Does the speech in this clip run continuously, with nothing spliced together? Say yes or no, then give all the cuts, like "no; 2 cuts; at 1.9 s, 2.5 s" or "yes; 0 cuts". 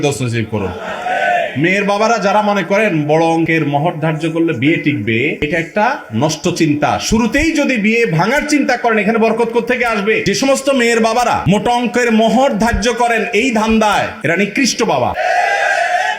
no; 3 cuts; at 10.2 s, 11.4 s, 15.2 s